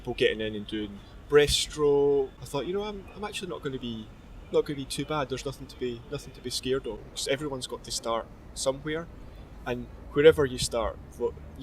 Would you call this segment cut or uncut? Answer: cut